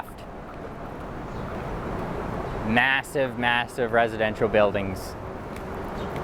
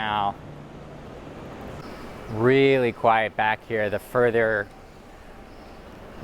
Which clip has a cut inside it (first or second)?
second